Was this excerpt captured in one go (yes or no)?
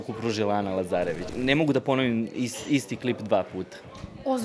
no